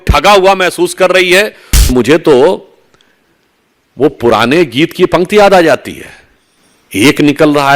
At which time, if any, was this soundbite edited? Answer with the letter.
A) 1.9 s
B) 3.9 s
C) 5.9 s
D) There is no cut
A